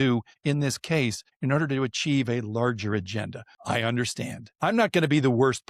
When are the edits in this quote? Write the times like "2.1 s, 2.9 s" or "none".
3.5 s, 4.5 s